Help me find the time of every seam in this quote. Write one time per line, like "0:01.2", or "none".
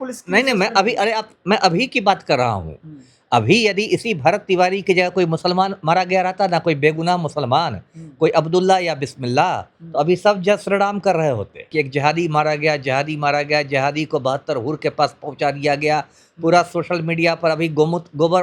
0:11.7